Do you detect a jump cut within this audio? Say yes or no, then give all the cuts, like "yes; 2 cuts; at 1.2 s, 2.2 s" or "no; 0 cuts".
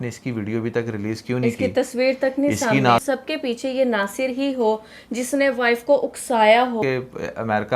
yes; 2 cuts; at 3.0 s, 6.8 s